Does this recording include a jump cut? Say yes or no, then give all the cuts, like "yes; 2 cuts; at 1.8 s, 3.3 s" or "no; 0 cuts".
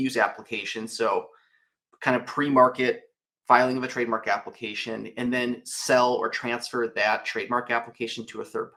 no; 0 cuts